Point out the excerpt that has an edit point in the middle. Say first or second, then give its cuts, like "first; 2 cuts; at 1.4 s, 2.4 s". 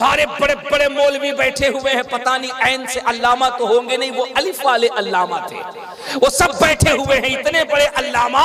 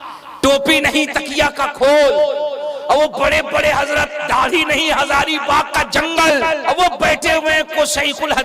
second; 1 cut; at 6.6 s